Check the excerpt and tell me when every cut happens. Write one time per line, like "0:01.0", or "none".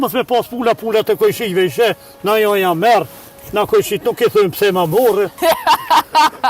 0:05.3

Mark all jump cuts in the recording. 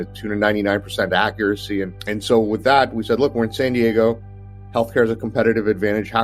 none

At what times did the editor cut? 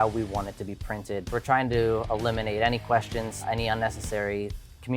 0:01.3
0:03.3

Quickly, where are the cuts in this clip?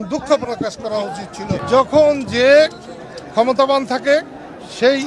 0:01.6

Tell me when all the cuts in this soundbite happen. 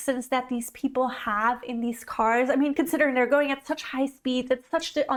none

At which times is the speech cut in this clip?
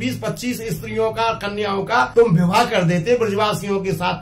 0:02.1

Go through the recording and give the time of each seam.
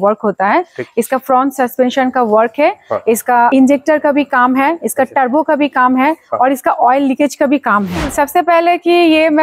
0:03.5
0:08.1

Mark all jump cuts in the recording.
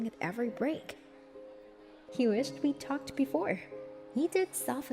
0:02.1

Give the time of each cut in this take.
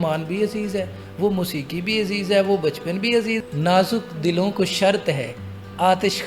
0:03.4

